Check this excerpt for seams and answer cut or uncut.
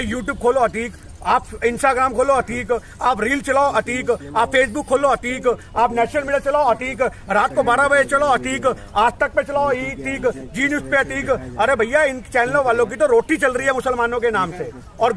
uncut